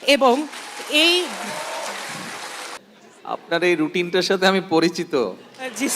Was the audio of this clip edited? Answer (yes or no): yes